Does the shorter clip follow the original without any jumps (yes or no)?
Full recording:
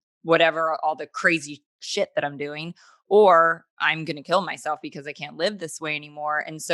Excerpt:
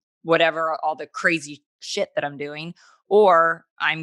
yes